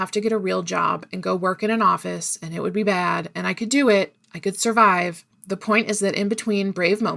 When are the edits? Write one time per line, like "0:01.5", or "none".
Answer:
0:05.3